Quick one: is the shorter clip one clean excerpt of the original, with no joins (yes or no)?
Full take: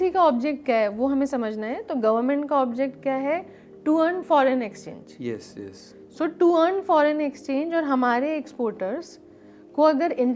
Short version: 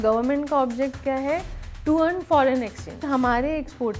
no